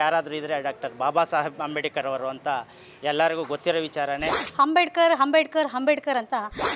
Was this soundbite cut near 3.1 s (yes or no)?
no